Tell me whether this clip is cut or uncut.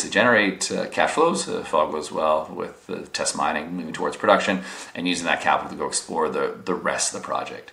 uncut